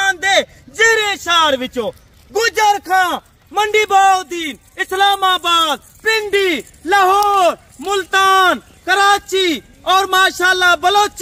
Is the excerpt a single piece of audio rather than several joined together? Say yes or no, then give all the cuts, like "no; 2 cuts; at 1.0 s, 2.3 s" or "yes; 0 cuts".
yes; 0 cuts